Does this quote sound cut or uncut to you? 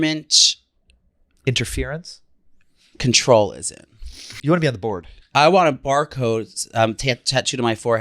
cut